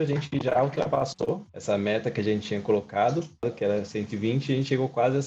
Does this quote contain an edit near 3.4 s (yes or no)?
yes